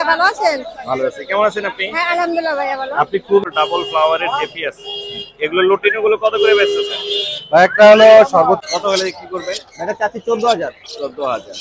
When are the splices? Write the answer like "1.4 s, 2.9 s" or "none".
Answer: 3.4 s, 8.6 s